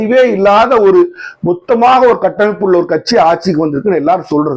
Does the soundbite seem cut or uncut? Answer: uncut